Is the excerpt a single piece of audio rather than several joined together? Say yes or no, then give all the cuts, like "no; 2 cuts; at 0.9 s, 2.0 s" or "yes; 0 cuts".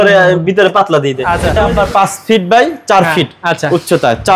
no; 1 cut; at 1.4 s